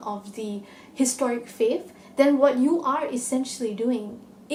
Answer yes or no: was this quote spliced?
no